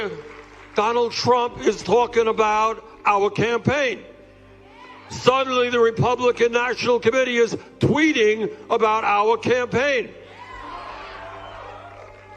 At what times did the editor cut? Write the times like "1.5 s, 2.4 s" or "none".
2.0 s